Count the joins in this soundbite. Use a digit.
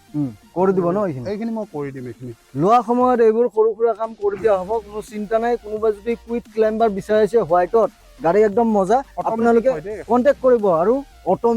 0